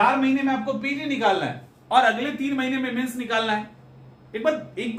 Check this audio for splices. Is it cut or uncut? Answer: uncut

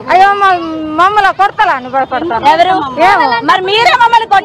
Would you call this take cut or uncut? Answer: uncut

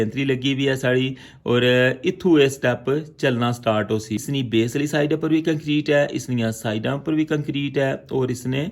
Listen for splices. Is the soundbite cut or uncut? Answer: cut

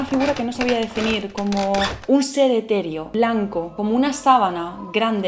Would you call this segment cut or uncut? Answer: cut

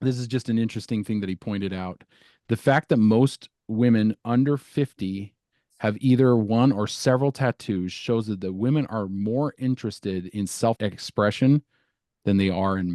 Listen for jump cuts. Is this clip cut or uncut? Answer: cut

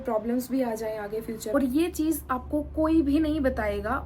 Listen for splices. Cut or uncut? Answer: cut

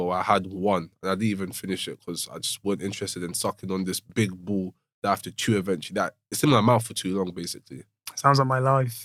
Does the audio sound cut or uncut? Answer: uncut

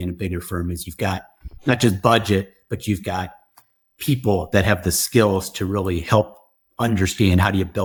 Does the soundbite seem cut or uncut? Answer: uncut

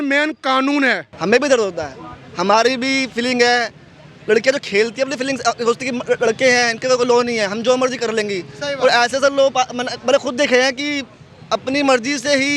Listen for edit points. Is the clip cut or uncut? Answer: cut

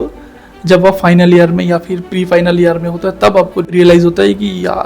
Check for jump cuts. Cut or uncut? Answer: cut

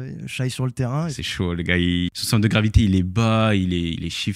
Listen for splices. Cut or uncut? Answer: cut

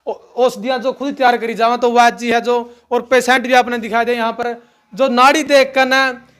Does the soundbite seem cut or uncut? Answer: uncut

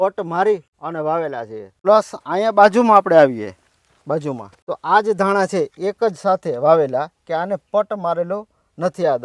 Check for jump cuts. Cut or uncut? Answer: cut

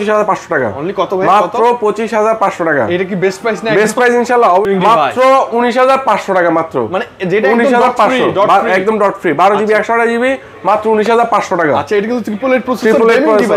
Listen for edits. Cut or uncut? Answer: cut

